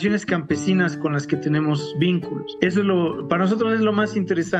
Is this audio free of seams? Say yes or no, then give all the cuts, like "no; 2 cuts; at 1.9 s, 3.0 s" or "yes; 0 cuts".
no; 1 cut; at 2.4 s